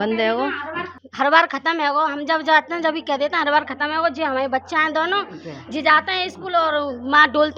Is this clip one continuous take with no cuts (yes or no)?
no